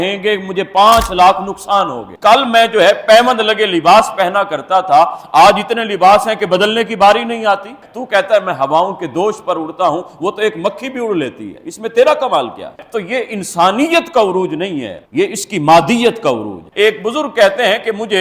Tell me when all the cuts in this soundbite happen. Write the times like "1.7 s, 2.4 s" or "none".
2.0 s, 7.9 s, 12.8 s, 16.6 s

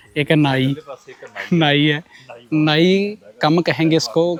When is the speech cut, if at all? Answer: none

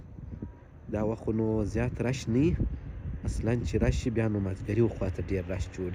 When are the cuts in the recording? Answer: none

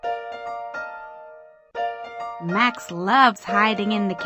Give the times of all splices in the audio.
1.0 s, 2.0 s

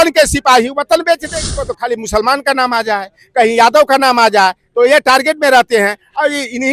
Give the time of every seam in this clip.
1.4 s

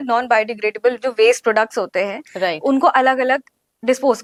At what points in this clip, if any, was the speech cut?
none

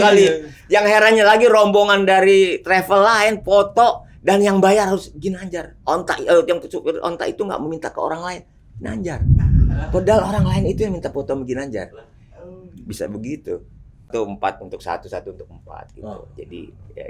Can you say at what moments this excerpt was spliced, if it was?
14.1 s

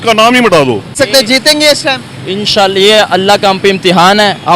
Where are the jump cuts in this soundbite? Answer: 0.9 s

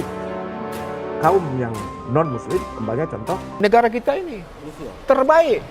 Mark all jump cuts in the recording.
3.5 s

